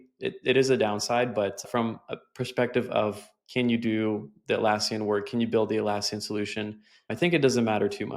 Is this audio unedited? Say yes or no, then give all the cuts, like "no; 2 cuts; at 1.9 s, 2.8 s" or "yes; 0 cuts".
no; 2 cuts; at 1.6 s, 7.1 s